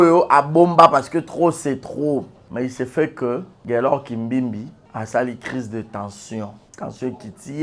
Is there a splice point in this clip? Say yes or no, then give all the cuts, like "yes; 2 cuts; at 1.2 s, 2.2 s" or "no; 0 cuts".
yes; 4 cuts; at 2.4 s, 3.5 s, 4.8 s, 6.6 s